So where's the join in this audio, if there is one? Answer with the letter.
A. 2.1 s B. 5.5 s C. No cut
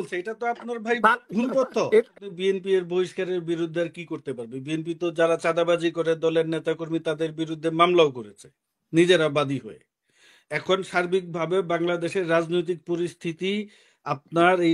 A